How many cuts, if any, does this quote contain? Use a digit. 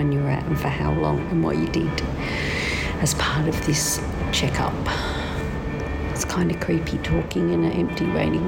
1